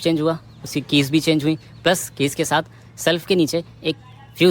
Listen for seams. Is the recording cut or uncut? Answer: uncut